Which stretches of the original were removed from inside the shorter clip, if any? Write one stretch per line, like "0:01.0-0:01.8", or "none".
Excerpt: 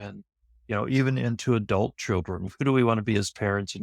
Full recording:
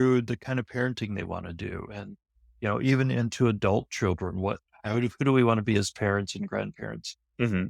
0:04.4-0:05.1